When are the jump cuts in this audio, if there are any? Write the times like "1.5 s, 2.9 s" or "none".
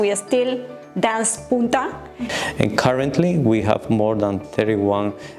2.2 s